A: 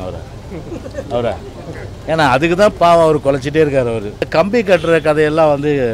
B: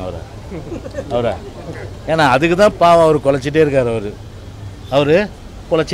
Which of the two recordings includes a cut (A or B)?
A